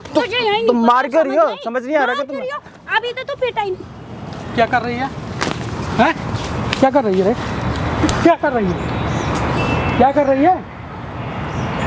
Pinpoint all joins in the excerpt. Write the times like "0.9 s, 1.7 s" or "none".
none